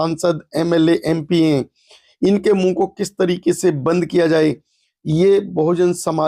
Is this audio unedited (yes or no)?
yes